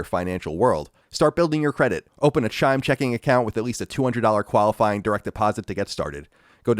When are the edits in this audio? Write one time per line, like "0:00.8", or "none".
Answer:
0:01.0